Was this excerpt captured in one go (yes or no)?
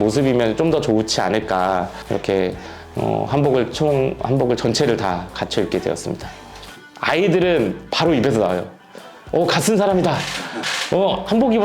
no